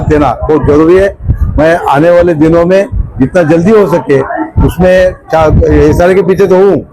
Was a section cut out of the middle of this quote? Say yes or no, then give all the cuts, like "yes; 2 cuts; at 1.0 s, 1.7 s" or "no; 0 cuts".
no; 0 cuts